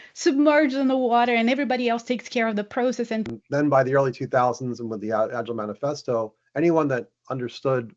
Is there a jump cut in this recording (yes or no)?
yes